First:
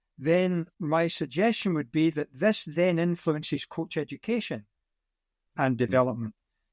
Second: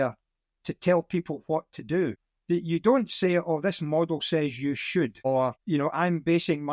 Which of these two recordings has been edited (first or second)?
second